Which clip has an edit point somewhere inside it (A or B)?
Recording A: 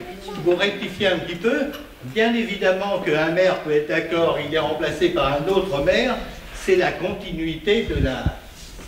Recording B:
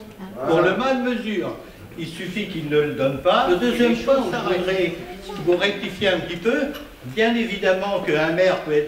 B